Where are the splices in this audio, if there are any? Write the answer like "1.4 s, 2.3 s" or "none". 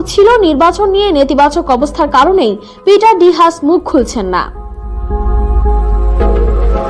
none